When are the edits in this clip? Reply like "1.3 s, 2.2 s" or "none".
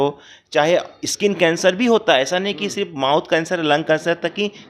none